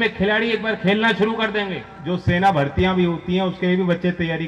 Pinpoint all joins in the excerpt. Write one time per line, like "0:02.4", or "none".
0:02.0

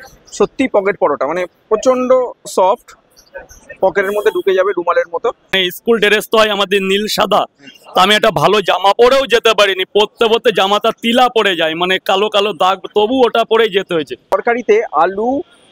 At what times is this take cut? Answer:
0:05.5
0:14.3

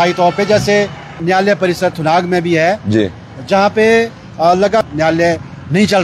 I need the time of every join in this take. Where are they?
0:01.2
0:04.8

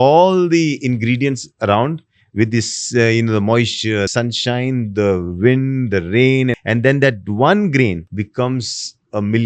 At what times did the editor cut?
0:04.1
0:06.6
0:08.1

